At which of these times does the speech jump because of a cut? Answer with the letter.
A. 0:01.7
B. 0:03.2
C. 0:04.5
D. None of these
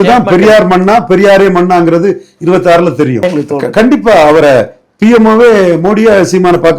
B